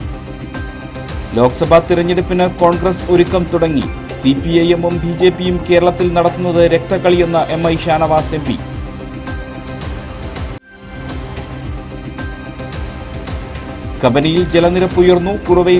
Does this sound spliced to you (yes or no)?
yes